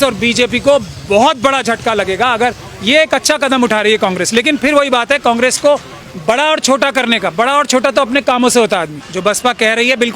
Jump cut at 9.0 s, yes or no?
yes